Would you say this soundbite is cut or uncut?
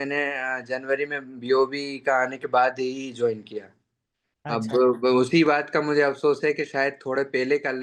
uncut